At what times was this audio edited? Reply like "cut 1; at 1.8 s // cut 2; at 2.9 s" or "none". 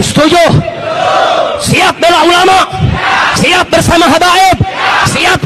none